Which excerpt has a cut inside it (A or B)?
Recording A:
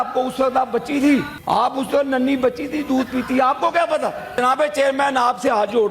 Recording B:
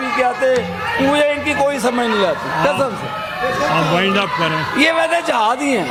A